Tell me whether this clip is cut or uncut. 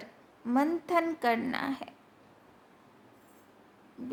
uncut